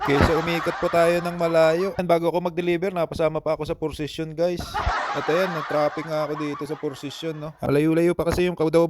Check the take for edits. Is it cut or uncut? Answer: cut